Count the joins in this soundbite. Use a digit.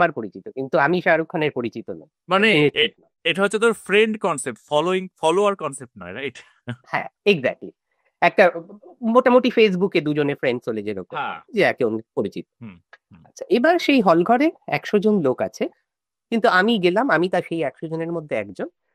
0